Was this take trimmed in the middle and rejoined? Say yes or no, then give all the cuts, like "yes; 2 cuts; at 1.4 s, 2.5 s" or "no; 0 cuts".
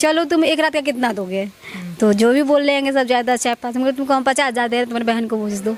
no; 0 cuts